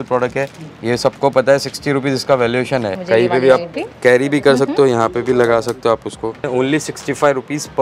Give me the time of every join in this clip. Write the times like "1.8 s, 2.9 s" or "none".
3.0 s, 6.5 s